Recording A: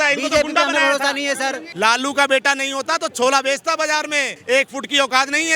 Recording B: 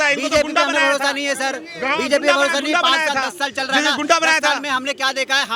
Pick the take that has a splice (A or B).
A